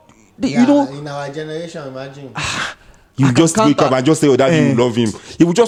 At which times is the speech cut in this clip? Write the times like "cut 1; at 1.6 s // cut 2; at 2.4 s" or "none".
none